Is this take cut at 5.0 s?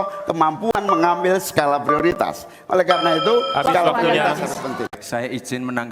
yes; 1 cut; at 5.0 s

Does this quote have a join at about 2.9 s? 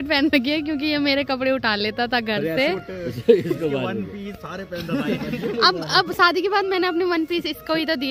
yes; 1 cut; at 2.9 s

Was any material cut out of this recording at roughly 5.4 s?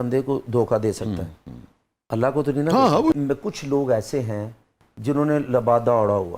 no; 1 cut; at 3.1 s

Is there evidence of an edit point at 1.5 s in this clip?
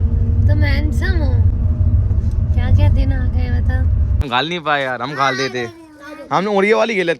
yes; 2 cuts; at 1.5 s, 4.2 s

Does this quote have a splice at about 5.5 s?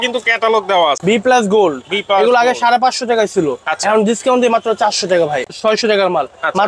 yes; 2 cuts; at 1.0 s, 5.5 s

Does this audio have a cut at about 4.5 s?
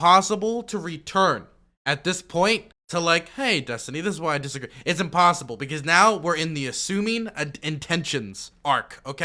no; 1 cut; at 2.8 s

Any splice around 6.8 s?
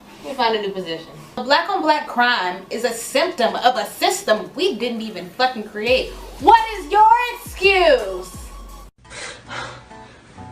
no; 1 cut; at 2.0 s

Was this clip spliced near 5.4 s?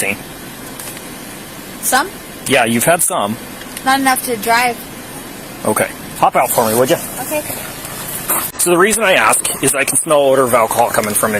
no; 1 cut; at 8.5 s

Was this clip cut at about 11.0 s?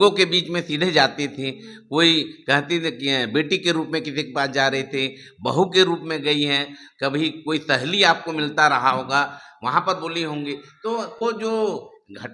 no; 0 cuts

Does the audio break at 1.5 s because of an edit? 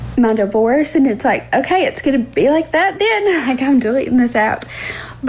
no; 0 cuts

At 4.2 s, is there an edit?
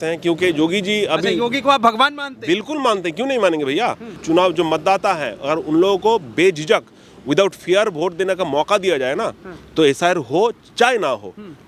yes; 1 cut; at 4.2 s

